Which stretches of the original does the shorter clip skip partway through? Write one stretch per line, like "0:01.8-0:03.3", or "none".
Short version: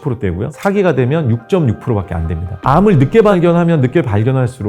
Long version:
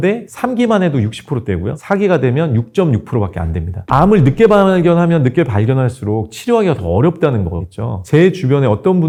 0:04.6-0:04.7